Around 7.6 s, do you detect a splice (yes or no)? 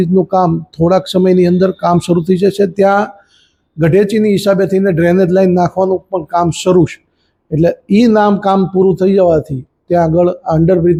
no